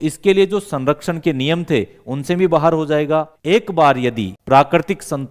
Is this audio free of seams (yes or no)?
no